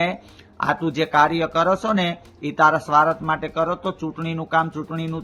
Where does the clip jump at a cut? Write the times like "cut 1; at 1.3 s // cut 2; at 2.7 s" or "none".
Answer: none